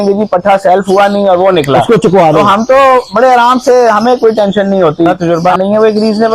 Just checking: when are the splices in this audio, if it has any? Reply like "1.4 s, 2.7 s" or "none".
5.1 s